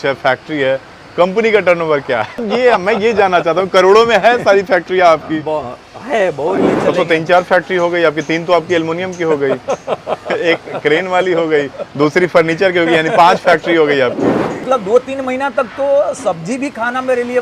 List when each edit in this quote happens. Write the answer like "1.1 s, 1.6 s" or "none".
2.4 s, 6.6 s, 14.7 s